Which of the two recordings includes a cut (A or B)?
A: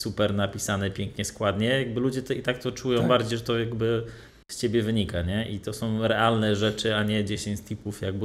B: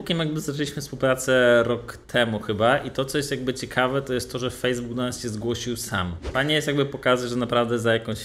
B